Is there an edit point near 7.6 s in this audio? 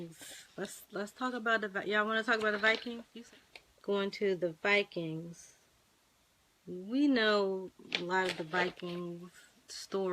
no; 1 cut; at 3.1 s

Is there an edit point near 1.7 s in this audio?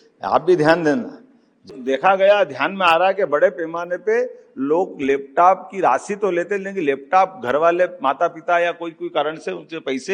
yes; 1 cut; at 1.7 s

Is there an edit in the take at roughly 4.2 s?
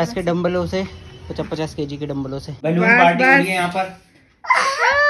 no; 1 cut; at 2.5 s

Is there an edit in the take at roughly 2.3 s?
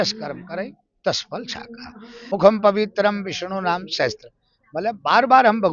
yes; 1 cut; at 2.3 s

